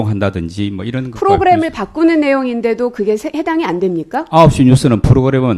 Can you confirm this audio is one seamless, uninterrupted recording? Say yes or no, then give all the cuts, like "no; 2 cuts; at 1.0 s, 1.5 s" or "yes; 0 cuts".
yes; 0 cuts